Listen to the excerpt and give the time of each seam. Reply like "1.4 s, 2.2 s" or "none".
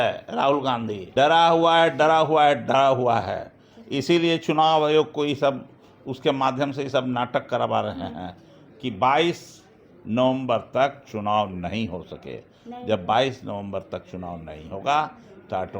1.0 s